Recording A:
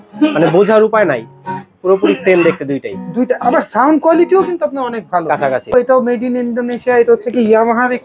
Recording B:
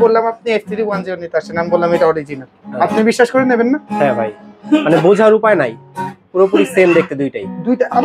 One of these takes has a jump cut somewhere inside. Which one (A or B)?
A